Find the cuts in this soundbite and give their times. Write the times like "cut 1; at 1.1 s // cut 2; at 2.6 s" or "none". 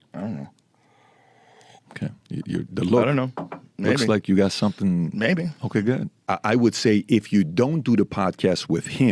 cut 1; at 5.6 s